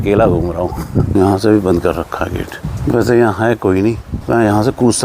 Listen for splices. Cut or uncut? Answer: cut